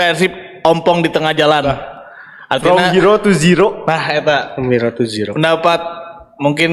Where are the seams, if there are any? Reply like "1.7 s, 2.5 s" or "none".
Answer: none